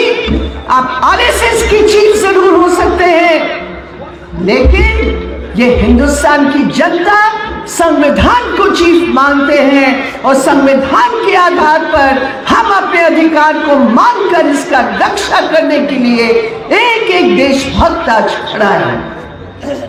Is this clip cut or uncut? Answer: uncut